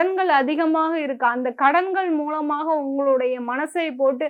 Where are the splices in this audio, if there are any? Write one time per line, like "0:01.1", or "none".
none